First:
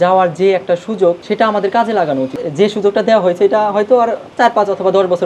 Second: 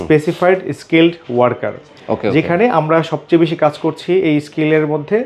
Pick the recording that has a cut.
first; 1 cut; at 2.4 s

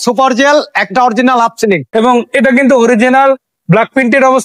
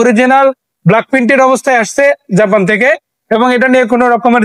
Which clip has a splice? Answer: first; 1 cut; at 1.9 s

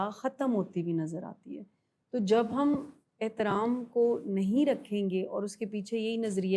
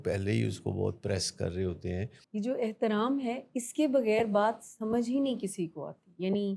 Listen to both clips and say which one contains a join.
second; 1 cut; at 2.2 s

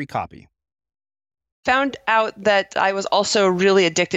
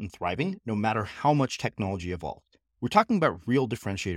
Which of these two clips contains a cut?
first; 1 cut; at 1.6 s

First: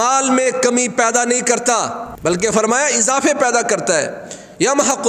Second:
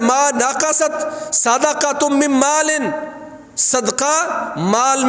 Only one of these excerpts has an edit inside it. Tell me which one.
first; 1 cut; at 2.1 s

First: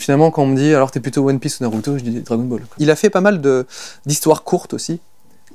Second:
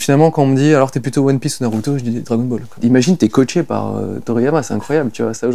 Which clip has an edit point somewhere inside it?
second; 1 cut; at 2.7 s

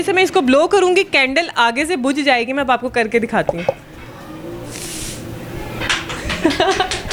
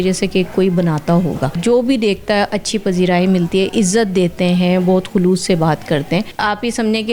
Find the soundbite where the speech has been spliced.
second; 2 cuts; at 1.6 s, 6.3 s

